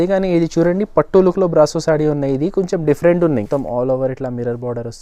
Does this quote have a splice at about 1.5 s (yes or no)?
no